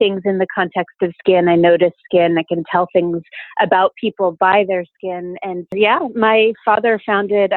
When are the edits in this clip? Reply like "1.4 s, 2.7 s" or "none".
5.7 s